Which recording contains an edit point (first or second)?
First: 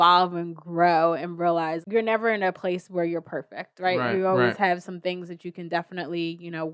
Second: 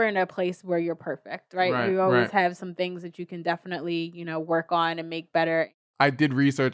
second